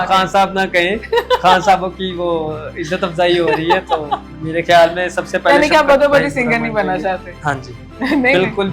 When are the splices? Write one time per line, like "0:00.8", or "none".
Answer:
none